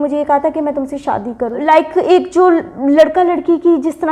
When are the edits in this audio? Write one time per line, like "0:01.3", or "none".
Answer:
0:01.6